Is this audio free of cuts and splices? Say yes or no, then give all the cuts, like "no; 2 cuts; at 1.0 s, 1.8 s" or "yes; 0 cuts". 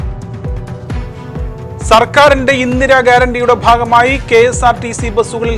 no; 2 cuts; at 1.0 s, 1.9 s